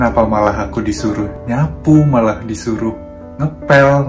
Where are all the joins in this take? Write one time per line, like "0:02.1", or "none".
0:01.4